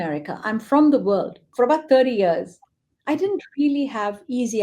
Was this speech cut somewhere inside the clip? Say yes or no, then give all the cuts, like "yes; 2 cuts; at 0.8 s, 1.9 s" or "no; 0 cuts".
yes; 1 cut; at 1.5 s